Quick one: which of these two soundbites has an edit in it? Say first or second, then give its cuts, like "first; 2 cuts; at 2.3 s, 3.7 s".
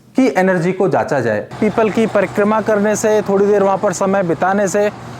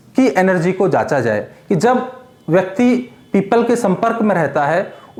first; 1 cut; at 1.5 s